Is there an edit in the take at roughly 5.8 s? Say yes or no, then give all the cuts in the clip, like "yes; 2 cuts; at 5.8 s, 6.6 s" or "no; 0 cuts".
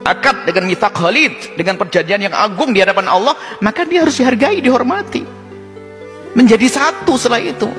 no; 0 cuts